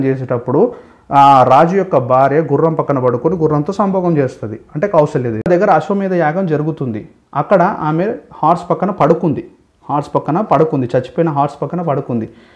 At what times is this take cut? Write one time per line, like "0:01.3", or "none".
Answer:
0:05.5

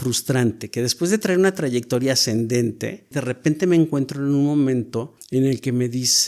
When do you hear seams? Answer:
0:03.2
0:05.2

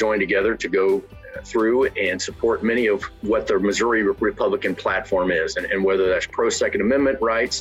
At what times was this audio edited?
0:04.2

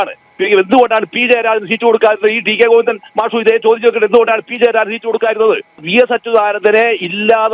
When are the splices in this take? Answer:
0:05.8

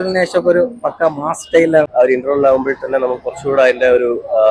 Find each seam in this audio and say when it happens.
0:01.9

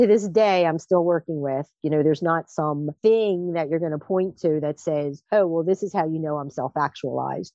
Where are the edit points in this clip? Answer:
0:01.7

